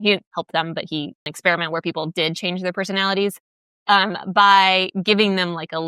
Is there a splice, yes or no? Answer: yes